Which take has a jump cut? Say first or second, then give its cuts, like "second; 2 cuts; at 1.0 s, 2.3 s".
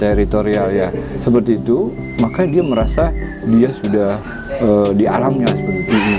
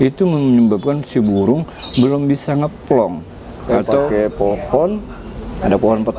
second; 1 cut; at 4.1 s